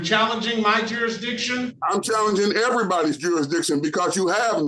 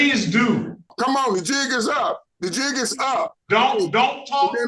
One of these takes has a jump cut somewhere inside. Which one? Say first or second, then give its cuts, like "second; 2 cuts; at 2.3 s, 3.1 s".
second; 3 cuts; at 0.9 s, 2.3 s, 3.4 s